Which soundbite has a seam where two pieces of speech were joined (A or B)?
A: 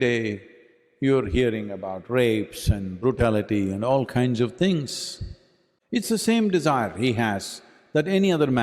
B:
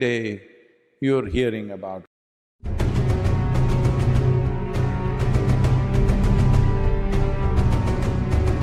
A